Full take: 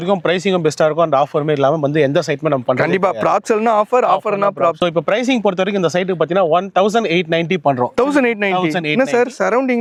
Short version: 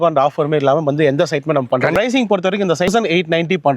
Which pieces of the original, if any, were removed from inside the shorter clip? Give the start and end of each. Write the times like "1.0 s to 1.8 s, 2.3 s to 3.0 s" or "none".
2.9 s to 5.1 s, 6.0 s to 6.9 s